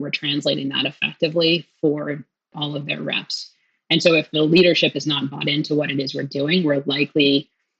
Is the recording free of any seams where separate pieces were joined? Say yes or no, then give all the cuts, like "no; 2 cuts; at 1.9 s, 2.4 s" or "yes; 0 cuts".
no; 2 cuts; at 2.5 s, 4.3 s